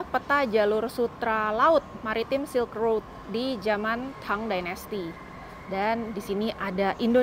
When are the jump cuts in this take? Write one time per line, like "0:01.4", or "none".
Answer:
none